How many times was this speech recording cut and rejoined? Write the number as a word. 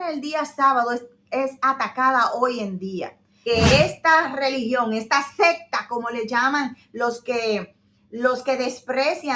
one